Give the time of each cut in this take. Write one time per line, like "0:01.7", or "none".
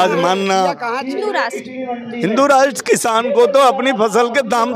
0:01.3